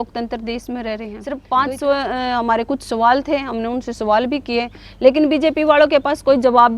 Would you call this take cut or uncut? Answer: cut